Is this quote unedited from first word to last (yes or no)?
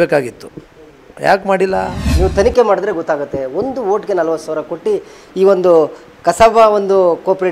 no